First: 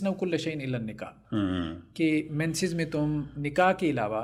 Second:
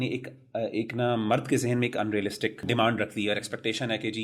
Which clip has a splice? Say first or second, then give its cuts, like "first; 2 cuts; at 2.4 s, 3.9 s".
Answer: second; 1 cut; at 2.6 s